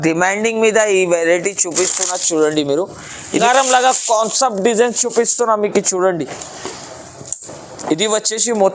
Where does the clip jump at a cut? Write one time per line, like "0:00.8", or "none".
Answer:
0:03.3